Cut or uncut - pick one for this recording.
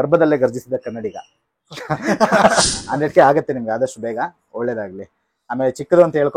cut